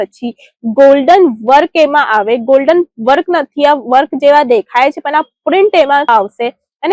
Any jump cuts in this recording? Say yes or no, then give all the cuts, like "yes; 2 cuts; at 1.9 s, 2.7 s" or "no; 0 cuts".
no; 0 cuts